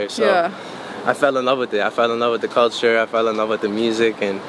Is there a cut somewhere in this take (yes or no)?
no